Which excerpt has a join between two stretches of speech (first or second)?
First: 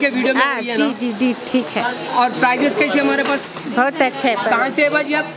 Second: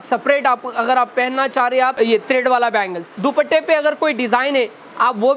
second